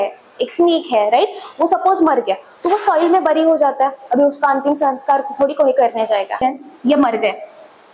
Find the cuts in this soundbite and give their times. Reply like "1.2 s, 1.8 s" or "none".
6.4 s